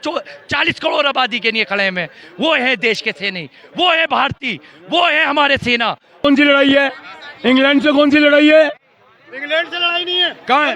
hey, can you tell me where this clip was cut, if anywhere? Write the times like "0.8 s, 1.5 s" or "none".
6.2 s